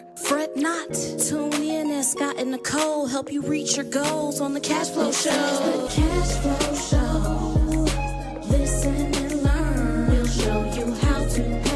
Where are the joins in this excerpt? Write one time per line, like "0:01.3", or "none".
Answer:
0:05.9